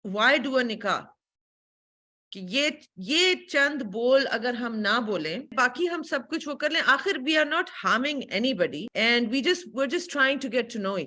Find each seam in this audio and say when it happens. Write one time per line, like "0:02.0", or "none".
0:05.5
0:08.8